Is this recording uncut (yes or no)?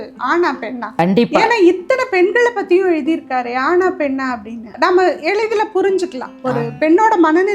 no